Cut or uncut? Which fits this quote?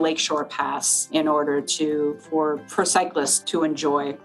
cut